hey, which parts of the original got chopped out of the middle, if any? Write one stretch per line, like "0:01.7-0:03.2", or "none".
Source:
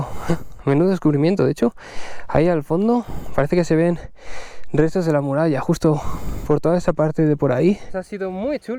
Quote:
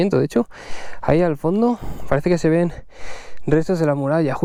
none